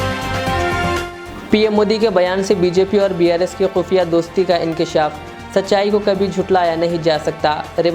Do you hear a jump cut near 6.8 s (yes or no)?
no